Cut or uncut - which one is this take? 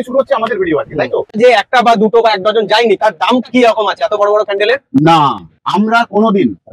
cut